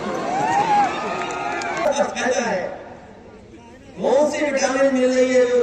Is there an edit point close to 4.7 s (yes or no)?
no